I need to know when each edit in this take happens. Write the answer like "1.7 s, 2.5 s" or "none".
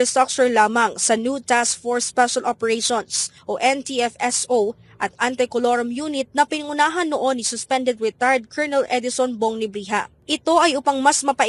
none